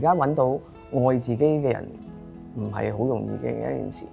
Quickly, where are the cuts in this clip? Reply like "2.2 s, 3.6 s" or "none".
none

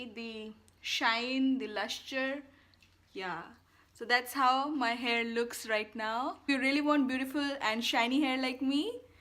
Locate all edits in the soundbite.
6.5 s

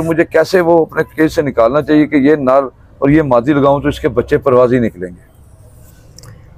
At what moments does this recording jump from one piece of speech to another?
none

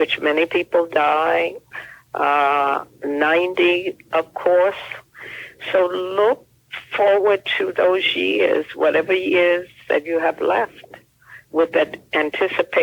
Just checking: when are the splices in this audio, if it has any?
none

